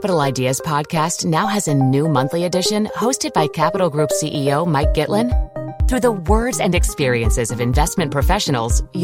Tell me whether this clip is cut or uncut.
uncut